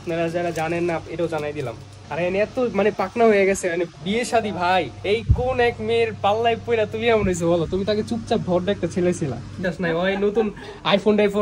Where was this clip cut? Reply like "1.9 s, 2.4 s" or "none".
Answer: 1.9 s, 4.9 s, 9.6 s

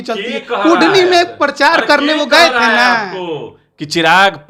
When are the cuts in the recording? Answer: none

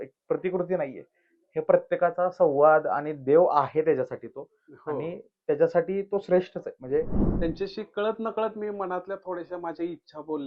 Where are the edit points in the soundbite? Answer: 7.2 s

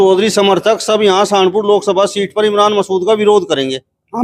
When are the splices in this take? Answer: none

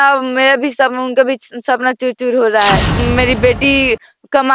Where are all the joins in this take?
3.0 s

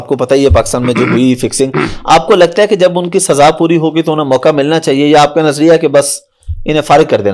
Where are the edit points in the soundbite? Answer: none

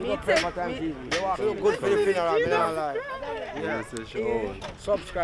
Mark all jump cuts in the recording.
1.4 s

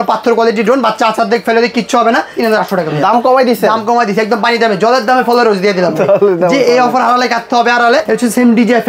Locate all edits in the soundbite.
2.4 s, 8.1 s

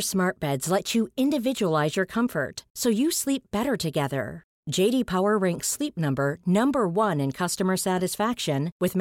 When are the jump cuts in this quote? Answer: none

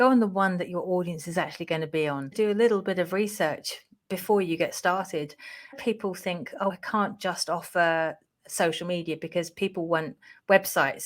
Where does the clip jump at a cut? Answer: 2.3 s, 5.8 s

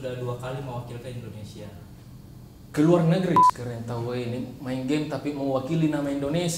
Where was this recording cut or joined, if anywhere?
3.5 s

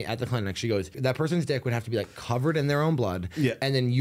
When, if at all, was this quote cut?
0.9 s

